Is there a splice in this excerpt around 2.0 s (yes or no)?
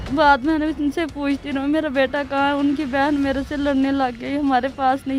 no